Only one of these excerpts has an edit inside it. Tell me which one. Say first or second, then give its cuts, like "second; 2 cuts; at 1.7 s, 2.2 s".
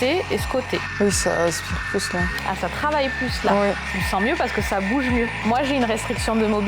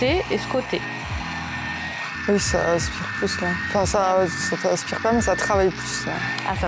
first; 4 cuts; at 0.9 s, 2.3 s, 3.9 s, 5.5 s